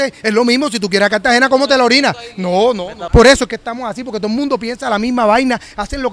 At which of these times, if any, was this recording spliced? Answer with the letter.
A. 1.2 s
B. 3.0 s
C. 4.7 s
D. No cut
B